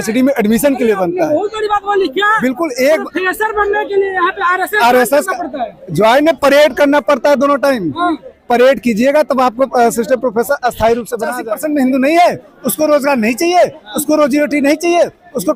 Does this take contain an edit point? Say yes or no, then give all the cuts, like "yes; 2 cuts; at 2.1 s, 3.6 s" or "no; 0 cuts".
yes; 1 cut; at 11.4 s